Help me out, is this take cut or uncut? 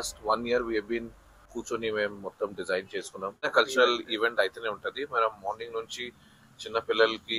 cut